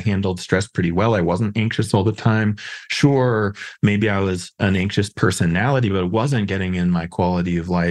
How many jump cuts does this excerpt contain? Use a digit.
1